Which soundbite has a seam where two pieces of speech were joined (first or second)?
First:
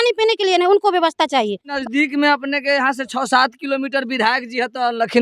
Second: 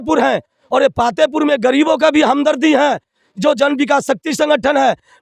first